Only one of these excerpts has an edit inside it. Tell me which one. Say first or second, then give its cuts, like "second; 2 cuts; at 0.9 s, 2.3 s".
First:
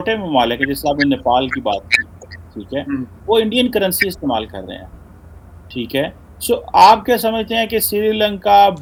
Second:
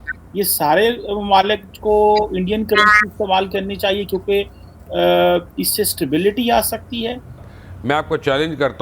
second; 1 cut; at 7.6 s